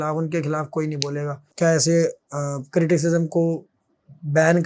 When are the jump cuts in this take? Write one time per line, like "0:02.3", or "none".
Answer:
0:01.5